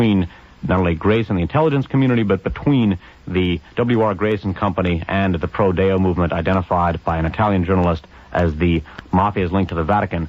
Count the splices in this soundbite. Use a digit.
1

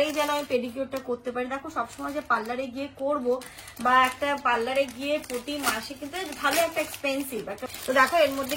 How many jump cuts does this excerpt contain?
1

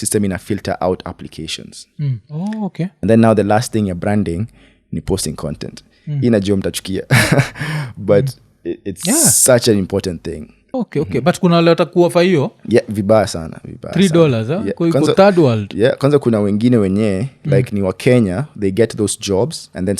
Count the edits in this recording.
2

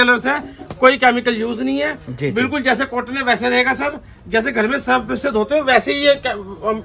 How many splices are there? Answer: 0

